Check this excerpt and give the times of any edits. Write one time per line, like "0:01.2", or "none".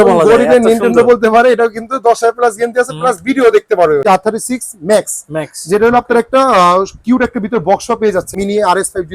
0:04.0
0:08.3